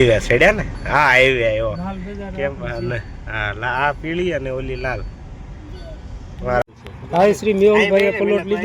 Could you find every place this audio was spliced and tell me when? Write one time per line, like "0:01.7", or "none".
0:06.7